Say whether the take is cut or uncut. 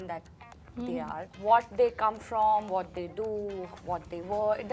cut